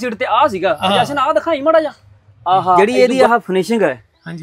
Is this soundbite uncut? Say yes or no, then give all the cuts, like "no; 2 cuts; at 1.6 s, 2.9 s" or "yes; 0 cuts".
no; 1 cut; at 2.8 s